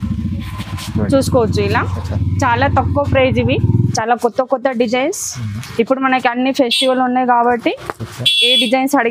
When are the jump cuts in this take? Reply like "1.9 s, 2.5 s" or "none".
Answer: 3.9 s